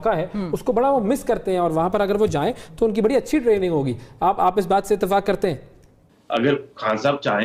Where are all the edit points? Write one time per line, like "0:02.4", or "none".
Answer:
0:06.0